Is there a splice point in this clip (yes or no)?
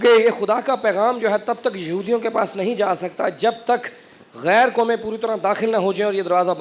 no